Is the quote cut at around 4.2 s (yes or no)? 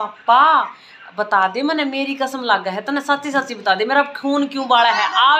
no